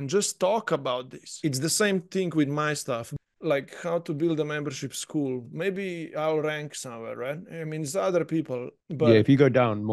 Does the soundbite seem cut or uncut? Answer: cut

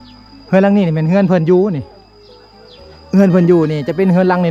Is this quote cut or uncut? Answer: uncut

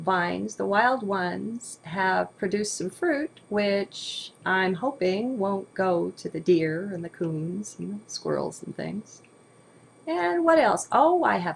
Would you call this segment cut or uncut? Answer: uncut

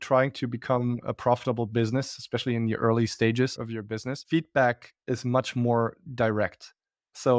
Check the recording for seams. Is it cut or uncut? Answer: cut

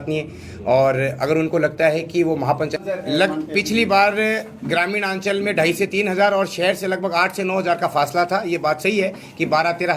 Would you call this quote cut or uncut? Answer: cut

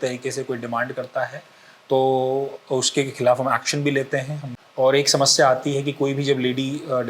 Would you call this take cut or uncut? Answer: cut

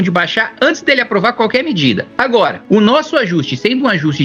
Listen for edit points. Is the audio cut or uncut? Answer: uncut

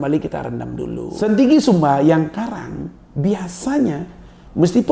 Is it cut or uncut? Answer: cut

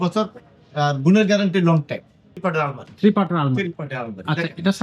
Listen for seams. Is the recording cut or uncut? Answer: cut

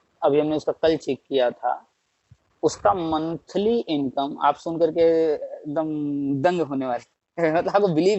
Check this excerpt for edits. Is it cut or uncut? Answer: uncut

